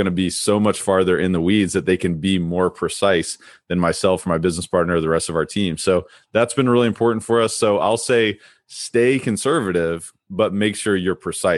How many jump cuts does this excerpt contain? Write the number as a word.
zero